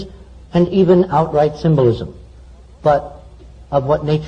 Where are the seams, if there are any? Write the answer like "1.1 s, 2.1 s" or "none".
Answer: 1.5 s

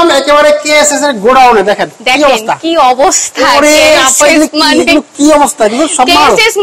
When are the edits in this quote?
none

